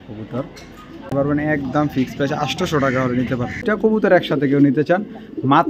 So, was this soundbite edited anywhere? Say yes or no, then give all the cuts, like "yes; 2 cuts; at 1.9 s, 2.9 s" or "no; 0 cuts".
yes; 2 cuts; at 1.1 s, 3.6 s